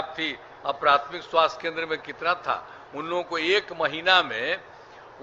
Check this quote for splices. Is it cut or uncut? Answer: uncut